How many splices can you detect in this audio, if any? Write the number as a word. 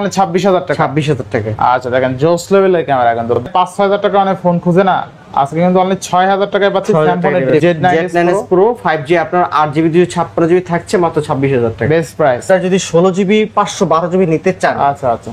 three